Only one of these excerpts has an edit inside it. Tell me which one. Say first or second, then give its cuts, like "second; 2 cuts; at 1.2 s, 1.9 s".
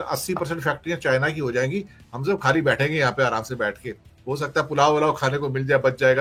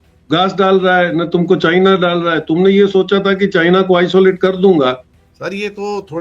second; 1 cut; at 5.1 s